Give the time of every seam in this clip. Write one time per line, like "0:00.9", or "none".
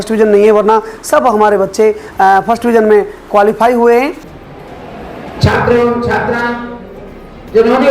0:04.2